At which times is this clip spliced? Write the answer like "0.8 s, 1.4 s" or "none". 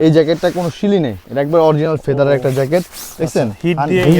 none